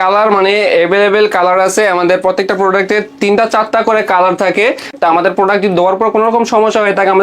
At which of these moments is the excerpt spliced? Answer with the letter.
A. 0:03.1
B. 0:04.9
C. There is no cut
B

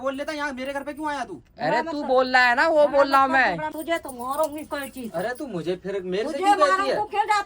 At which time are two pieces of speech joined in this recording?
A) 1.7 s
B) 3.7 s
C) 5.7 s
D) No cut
B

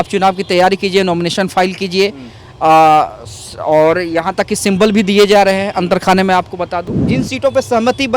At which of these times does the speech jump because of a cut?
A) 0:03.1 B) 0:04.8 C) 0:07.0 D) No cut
C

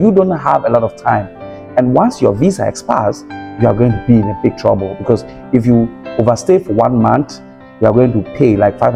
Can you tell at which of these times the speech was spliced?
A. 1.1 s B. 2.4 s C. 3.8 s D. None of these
D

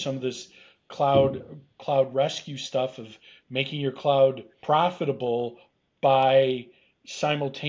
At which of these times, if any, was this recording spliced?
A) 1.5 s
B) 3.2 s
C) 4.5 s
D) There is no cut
C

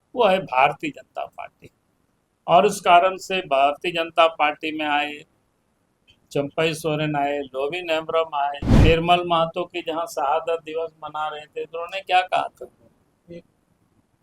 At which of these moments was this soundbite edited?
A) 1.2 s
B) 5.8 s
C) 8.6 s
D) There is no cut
C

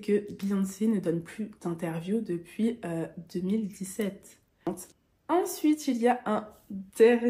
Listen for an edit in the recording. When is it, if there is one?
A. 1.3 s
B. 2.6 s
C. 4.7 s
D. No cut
C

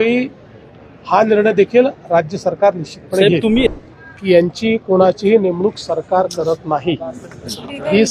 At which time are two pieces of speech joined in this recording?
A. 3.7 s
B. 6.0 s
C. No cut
A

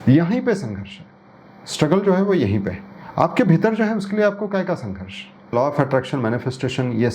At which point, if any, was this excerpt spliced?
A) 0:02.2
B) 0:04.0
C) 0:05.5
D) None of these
C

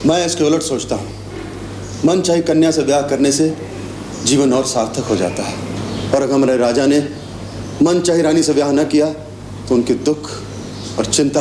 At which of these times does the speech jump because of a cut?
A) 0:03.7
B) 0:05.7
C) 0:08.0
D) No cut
D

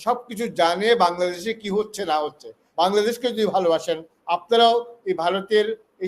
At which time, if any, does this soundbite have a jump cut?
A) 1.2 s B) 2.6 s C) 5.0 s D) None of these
B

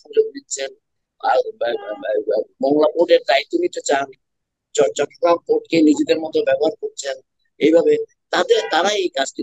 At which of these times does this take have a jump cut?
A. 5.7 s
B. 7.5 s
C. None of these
C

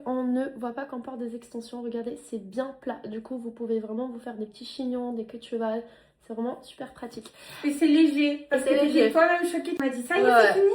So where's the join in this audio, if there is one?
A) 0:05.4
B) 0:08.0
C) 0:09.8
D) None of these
C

